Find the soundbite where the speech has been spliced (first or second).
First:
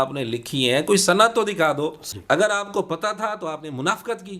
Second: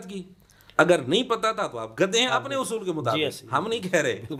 first